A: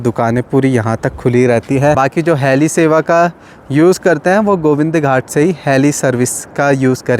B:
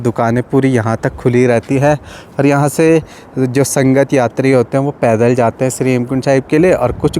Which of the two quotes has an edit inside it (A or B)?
A